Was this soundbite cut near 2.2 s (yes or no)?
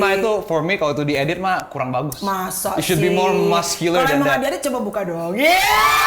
no